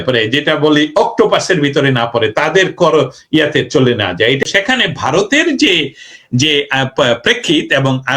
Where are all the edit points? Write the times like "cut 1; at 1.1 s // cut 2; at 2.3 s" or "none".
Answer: cut 1; at 4.4 s